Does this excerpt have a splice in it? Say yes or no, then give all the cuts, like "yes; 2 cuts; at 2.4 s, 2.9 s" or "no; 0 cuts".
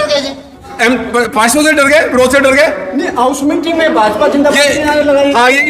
no; 0 cuts